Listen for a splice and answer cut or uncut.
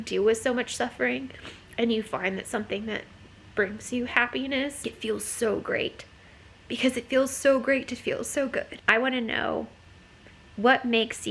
cut